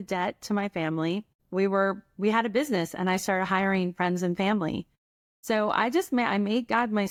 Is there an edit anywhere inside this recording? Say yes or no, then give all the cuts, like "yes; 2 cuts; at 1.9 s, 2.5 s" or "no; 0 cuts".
no; 0 cuts